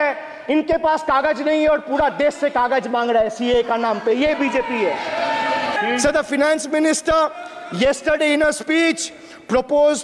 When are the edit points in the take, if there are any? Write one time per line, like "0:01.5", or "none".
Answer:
0:05.8